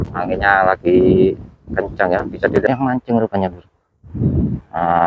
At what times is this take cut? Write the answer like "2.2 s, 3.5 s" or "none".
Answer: 2.7 s